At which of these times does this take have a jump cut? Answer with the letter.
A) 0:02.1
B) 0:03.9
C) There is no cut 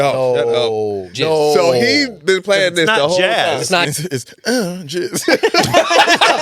B